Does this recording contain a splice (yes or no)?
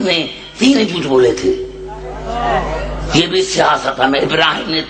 no